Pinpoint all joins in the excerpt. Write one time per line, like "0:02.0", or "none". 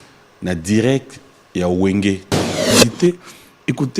0:02.7